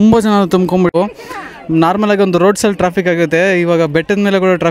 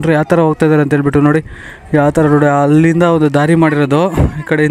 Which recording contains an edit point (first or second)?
first